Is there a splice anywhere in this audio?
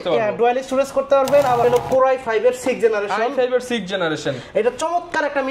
yes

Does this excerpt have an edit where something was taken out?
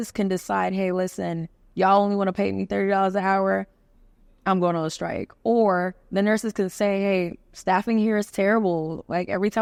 no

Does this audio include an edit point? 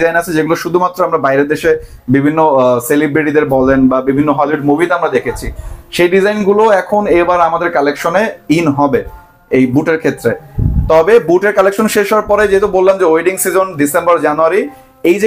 no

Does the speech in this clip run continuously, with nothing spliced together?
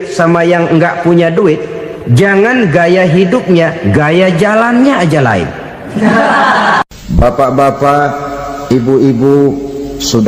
no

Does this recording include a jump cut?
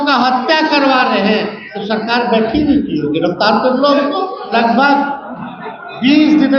yes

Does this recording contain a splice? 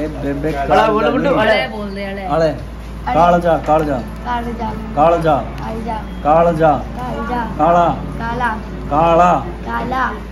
no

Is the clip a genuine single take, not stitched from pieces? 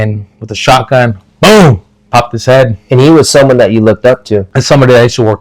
no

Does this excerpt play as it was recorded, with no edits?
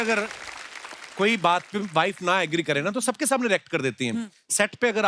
yes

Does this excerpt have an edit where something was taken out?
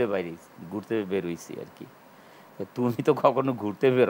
no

